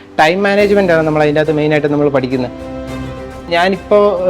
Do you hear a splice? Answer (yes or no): yes